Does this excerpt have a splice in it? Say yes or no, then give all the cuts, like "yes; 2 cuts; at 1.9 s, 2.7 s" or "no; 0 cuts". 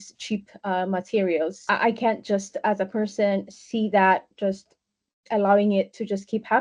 yes; 1 cut; at 1.6 s